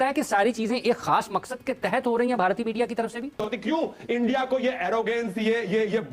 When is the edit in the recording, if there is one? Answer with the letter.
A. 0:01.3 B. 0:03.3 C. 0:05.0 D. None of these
B